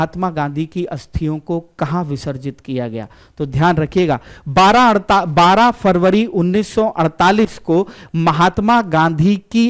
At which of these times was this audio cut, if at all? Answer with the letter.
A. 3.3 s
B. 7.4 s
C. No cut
C